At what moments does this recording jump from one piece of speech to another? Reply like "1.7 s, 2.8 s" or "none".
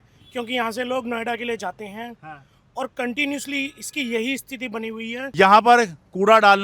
5.2 s